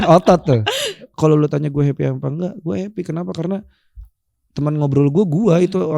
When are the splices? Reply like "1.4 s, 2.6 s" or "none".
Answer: 1.0 s